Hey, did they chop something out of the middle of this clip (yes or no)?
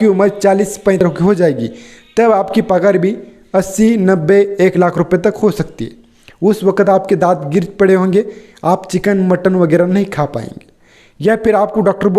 yes